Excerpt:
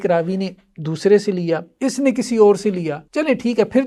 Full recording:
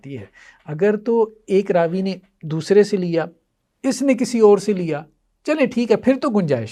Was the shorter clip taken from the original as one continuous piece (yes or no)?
no